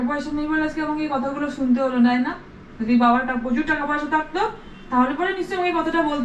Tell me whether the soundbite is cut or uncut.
uncut